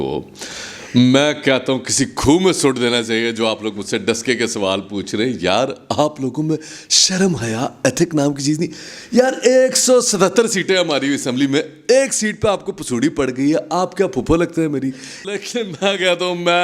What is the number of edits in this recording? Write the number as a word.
one